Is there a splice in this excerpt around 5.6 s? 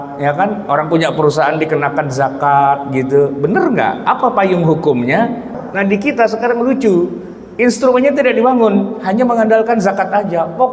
yes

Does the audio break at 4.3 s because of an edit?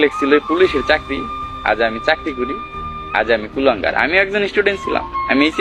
no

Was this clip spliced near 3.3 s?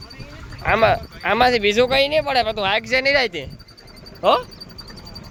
no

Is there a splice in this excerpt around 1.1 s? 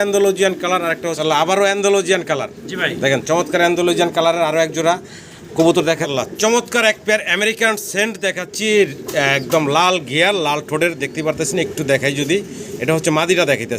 yes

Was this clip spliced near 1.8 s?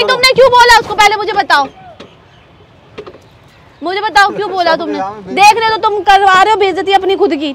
no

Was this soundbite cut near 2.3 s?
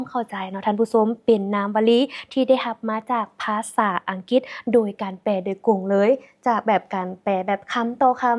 no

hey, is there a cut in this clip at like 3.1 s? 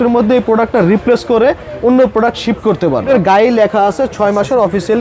yes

